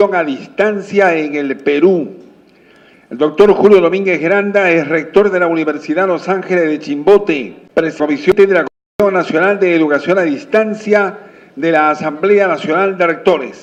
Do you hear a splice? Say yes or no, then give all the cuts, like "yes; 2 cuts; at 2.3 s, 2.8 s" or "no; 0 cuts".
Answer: no; 0 cuts